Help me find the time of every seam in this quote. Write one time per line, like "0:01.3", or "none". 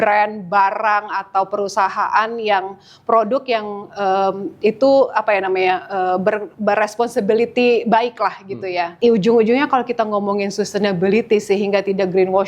0:08.8